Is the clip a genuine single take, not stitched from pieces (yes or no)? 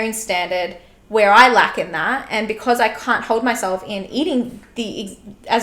yes